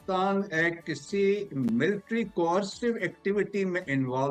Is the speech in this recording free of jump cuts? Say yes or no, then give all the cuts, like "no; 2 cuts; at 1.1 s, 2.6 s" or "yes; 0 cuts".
yes; 0 cuts